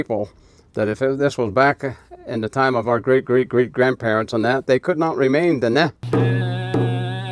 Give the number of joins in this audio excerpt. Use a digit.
1